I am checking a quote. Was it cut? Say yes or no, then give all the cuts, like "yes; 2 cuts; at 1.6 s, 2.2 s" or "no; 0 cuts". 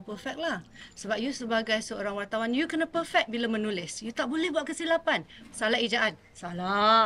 no; 0 cuts